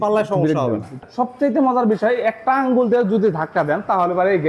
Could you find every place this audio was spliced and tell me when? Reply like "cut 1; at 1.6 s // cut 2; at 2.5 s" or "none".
cut 1; at 1.0 s